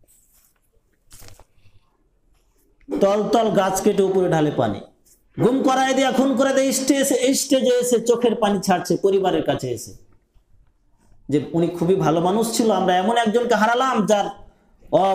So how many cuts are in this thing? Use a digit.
0